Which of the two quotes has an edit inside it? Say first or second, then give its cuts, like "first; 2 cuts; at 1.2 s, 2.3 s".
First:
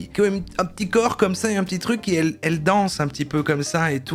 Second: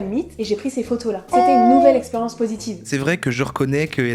second; 1 cut; at 2.8 s